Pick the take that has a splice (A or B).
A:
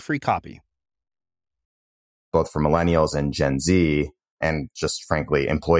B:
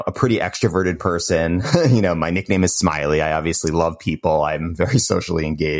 A